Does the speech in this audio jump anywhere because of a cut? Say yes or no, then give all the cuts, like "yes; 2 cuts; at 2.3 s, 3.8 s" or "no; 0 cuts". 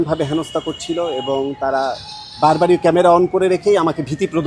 no; 0 cuts